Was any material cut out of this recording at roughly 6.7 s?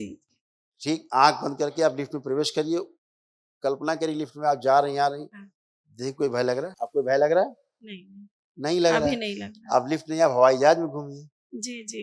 yes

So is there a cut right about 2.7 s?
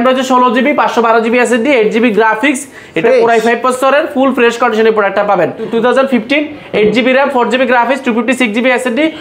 no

